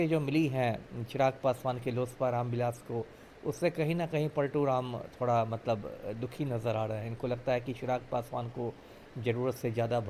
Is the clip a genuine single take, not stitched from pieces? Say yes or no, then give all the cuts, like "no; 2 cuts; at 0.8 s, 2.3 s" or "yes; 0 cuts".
yes; 0 cuts